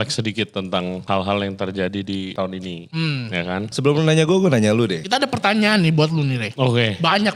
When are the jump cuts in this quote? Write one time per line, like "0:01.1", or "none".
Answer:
0:01.0
0:02.3
0:03.7
0:05.0
0:06.5